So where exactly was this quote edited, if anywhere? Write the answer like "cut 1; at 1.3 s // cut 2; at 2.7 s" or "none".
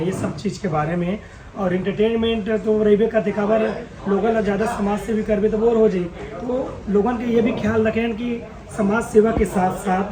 none